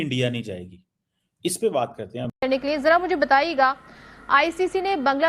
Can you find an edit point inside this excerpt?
yes; 1 cut; at 2.2 s

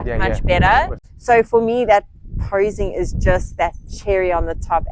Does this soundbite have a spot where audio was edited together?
yes; 1 cut; at 1.1 s

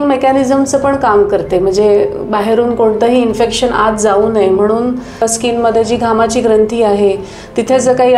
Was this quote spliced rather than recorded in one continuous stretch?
yes; 1 cut; at 5.2 s

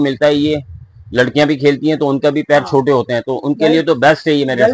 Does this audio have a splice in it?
no; 0 cuts

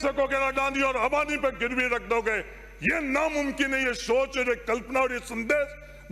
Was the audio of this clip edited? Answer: no; 0 cuts

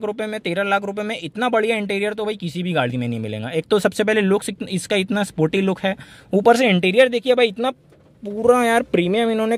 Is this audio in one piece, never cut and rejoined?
yes; 0 cuts

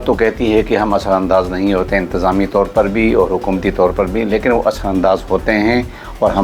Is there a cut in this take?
no; 0 cuts

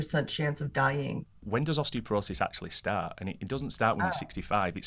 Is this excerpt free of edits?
no; 1 cut; at 1.3 s

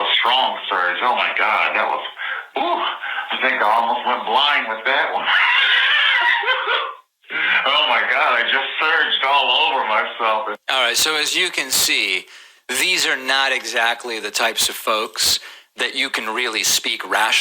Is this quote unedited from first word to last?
no; 1 cut; at 11.8 s

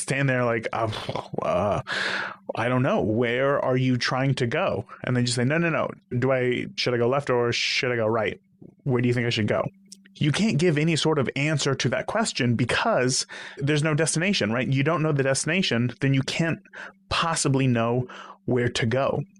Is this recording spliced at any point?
no; 0 cuts

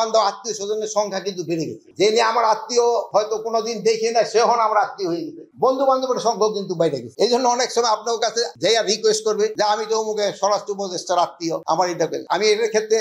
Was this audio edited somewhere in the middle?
no; 0 cuts

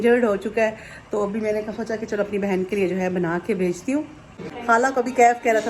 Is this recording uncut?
no; 1 cut; at 4.4 s

